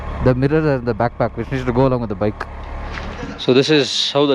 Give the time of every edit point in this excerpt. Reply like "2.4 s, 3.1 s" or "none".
3.2 s